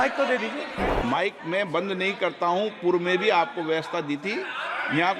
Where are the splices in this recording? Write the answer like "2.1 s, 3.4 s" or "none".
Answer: 0.9 s